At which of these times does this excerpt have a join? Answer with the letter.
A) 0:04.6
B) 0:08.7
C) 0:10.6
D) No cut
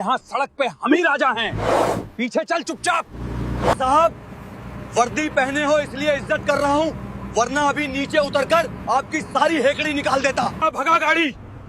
C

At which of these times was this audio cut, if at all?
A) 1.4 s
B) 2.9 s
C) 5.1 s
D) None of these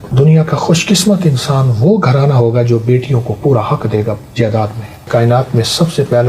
C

